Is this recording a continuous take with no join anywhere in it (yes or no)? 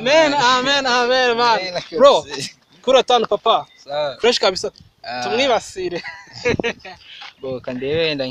no